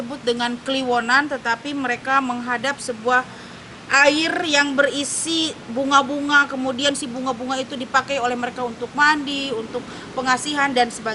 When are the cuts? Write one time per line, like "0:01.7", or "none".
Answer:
none